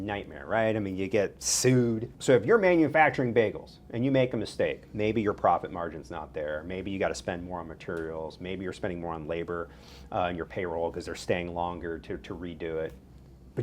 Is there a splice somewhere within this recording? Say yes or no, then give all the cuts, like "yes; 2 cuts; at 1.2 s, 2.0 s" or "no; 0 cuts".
yes; 1 cut; at 2.1 s